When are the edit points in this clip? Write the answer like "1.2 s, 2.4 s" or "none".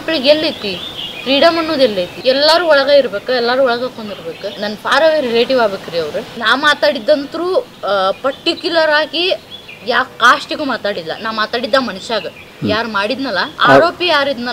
2.1 s, 4.5 s, 6.3 s, 13.5 s